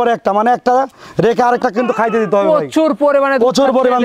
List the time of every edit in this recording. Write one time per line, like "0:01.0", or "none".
none